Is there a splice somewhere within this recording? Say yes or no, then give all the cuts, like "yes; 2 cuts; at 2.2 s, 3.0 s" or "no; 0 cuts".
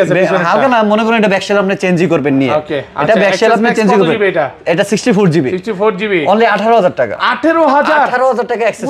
no; 0 cuts